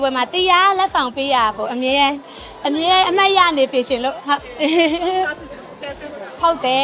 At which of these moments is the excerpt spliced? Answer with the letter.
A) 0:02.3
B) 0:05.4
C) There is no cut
C